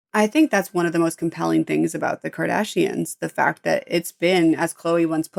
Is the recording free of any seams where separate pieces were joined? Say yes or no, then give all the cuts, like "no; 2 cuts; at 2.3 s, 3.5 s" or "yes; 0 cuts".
yes; 0 cuts